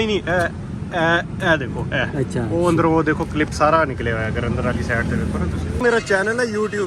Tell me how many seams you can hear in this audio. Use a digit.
1